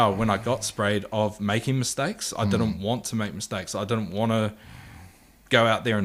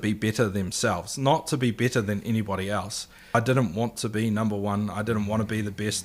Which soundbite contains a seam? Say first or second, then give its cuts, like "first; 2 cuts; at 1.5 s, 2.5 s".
second; 1 cut; at 3.3 s